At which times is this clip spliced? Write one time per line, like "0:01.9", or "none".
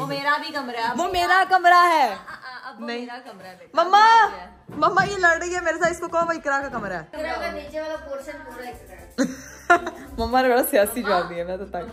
none